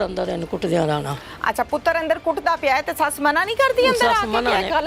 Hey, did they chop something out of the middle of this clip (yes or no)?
no